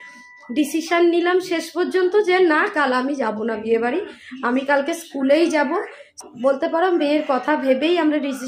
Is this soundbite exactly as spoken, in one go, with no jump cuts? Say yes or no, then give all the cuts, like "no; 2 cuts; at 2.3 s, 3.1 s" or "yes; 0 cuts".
yes; 0 cuts